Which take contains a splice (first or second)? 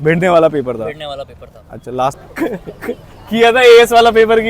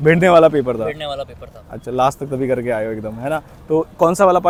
first